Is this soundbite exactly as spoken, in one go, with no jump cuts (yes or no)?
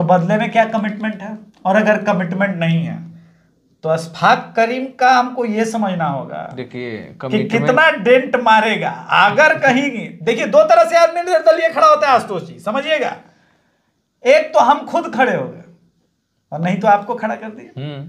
yes